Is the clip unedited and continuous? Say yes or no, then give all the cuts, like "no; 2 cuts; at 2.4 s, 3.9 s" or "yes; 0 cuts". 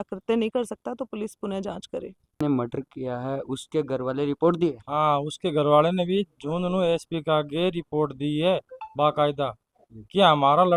no; 1 cut; at 2.4 s